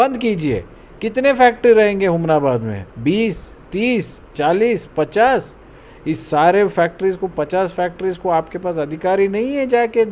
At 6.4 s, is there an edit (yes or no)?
no